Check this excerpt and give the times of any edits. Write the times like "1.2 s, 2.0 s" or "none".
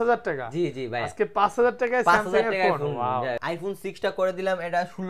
3.4 s